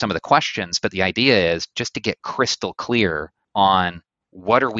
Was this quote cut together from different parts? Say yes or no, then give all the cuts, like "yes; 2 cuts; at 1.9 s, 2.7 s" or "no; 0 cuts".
yes; 1 cut; at 3.3 s